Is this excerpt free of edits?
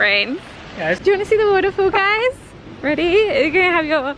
no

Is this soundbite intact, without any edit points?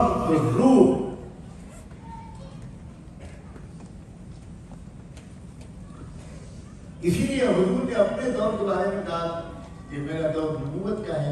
yes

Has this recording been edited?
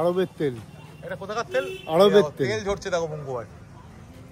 no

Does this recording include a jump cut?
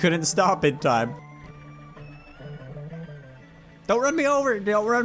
yes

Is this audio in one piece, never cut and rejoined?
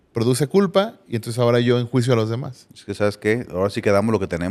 yes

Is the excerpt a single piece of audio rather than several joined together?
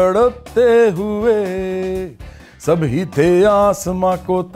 no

